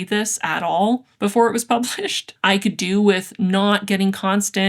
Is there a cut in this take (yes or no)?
yes